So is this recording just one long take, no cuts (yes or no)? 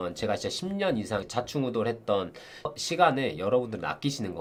yes